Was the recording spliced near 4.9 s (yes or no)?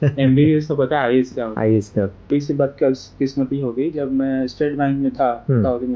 no